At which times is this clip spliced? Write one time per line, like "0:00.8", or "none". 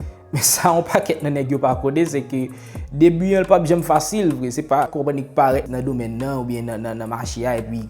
0:04.9
0:05.7